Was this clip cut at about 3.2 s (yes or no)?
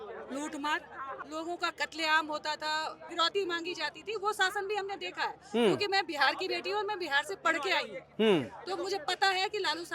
no